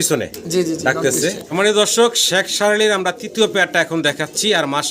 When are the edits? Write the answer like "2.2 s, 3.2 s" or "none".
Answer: 1.4 s

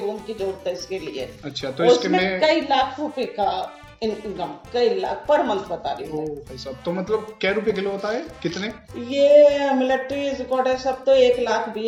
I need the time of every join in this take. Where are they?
none

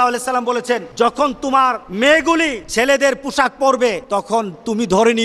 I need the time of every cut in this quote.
0.9 s, 1.8 s, 2.6 s, 4.0 s

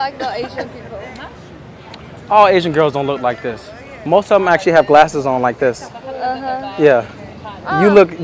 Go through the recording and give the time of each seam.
none

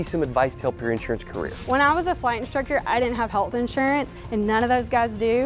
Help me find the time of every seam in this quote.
1.4 s

